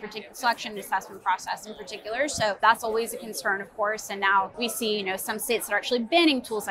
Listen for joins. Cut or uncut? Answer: cut